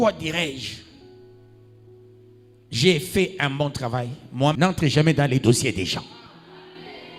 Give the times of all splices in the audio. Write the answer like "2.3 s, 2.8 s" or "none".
4.5 s